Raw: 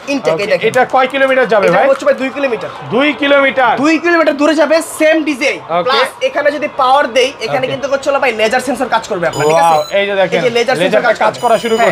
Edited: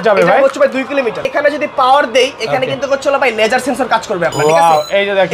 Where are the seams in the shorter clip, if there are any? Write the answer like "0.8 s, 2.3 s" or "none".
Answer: 1.2 s